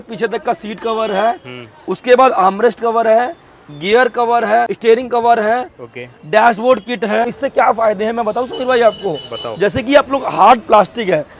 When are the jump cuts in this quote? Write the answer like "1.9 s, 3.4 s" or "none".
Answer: 4.7 s, 7.3 s